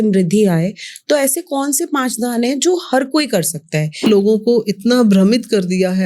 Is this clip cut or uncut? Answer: cut